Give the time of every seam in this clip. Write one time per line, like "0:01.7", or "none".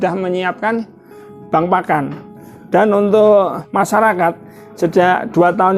0:03.6